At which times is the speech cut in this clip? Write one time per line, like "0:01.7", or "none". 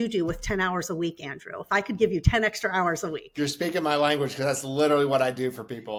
none

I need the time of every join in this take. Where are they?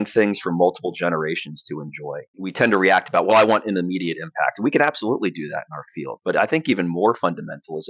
0:02.4

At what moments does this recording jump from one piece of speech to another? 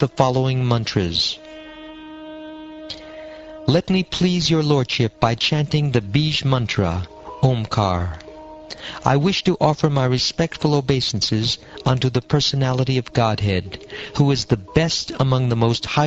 0:10.4

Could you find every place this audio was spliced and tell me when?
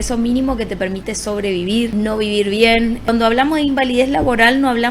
0:01.9
0:03.1

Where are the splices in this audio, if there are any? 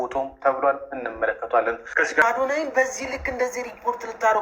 0:02.2

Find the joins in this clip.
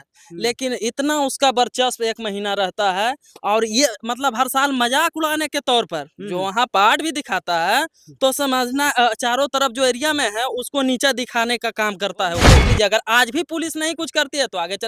0:12.6

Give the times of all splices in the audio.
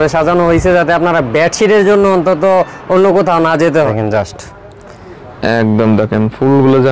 0:03.9

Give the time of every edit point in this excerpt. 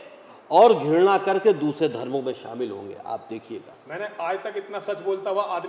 0:03.8

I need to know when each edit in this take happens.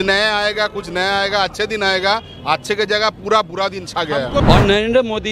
0:04.4

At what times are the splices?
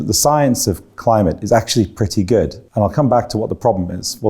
0:02.6

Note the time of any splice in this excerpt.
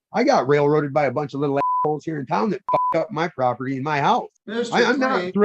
0:04.4

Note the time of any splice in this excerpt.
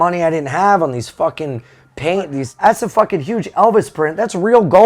0:02.4

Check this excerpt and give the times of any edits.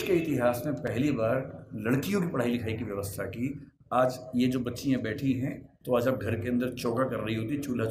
0:05.7

